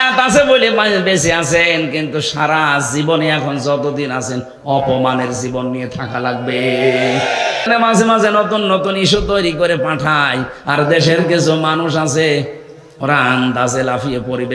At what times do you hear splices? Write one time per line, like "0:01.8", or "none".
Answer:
0:07.7